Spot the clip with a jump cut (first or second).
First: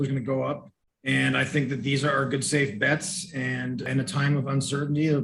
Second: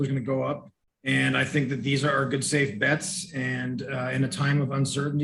first